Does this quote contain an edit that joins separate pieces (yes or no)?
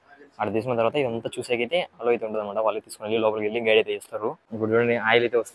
yes